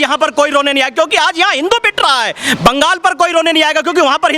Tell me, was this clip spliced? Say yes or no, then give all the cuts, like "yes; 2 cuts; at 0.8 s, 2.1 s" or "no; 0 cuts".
no; 0 cuts